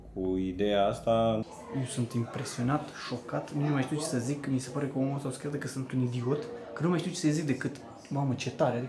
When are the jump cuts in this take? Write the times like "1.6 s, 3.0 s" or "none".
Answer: 1.6 s